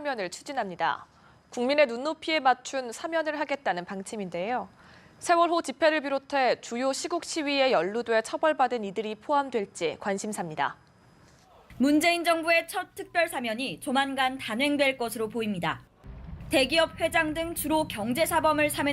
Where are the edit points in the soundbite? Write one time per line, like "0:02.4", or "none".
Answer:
0:03.9